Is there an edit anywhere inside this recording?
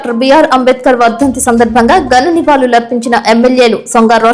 no; 0 cuts

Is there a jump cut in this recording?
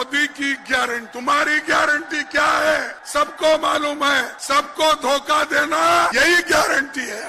yes; 4 cuts; at 1.1 s, 3.0 s, 4.3 s, 6.1 s

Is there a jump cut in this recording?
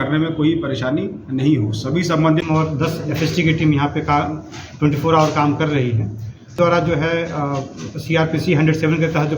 yes; 2 cuts; at 2.4 s, 6.6 s

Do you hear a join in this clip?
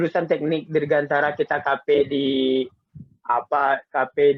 no; 0 cuts

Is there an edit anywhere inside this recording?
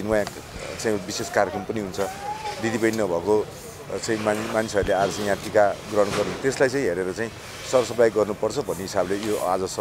no; 0 cuts

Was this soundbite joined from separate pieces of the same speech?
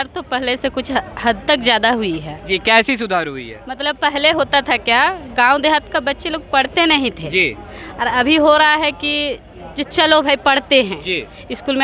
no; 0 cuts

